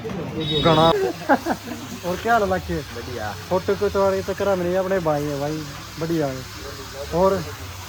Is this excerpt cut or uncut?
cut